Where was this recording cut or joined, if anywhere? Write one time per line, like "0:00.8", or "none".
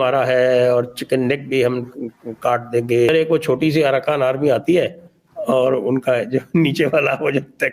0:03.1